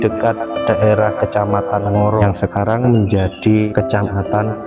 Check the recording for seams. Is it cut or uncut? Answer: cut